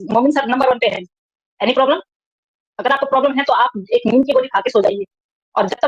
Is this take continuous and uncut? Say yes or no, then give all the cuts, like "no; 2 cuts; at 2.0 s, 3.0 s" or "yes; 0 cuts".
yes; 0 cuts